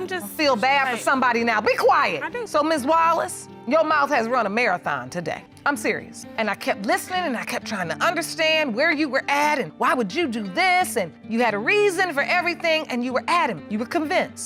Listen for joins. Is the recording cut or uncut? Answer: uncut